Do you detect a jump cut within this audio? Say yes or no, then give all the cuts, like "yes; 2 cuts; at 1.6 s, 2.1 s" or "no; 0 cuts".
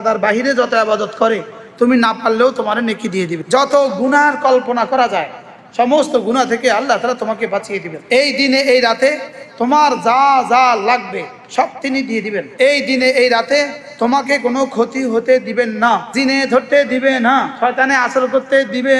yes; 5 cuts; at 3.4 s, 7.9 s, 12.4 s, 16.1 s, 17.5 s